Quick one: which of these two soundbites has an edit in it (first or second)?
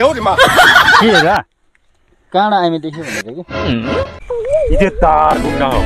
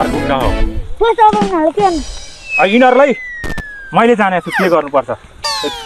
first